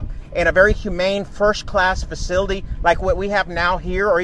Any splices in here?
no; 0 cuts

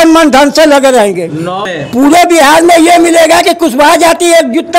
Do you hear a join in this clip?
yes; 1 cut; at 1.6 s

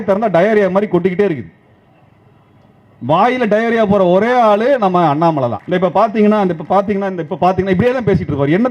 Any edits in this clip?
yes; 1 cut; at 5.6 s

